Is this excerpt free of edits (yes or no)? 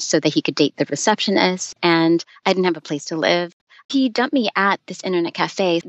no